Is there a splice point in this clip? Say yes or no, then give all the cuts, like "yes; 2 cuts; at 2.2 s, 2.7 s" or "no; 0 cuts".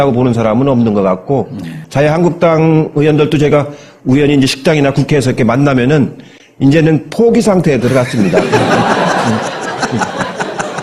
no; 0 cuts